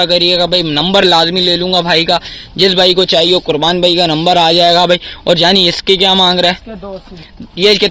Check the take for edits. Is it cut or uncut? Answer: uncut